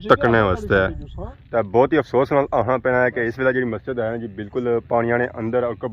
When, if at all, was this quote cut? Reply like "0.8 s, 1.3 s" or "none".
none